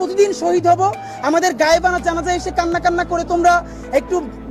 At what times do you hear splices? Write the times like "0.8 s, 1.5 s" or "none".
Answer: none